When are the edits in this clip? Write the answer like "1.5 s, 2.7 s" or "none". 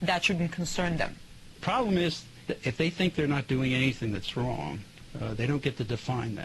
1.6 s, 2.4 s